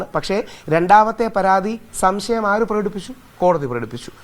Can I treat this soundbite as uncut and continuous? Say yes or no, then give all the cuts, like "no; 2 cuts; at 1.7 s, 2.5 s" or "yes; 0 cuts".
yes; 0 cuts